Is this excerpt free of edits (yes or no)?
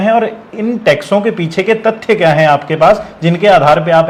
yes